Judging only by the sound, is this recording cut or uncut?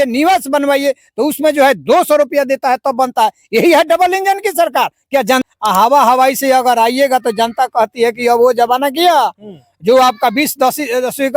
cut